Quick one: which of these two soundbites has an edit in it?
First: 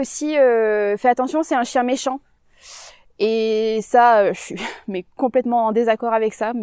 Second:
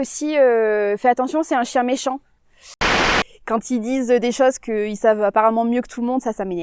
second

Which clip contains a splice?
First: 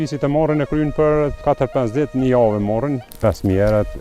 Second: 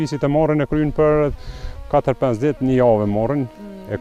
first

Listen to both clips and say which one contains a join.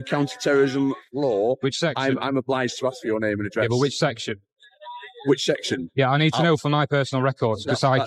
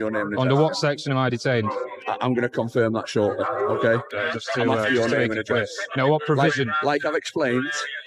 second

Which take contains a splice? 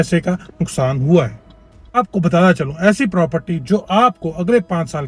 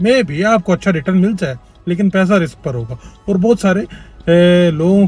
first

